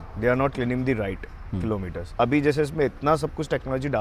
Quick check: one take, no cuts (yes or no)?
no